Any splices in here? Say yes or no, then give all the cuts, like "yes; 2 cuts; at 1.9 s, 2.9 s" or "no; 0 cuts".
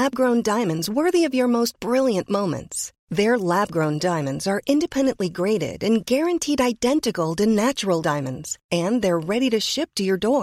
no; 0 cuts